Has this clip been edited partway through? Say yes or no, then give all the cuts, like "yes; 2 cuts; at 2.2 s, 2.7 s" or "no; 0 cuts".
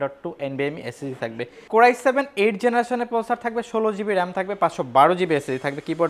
yes; 1 cut; at 1.5 s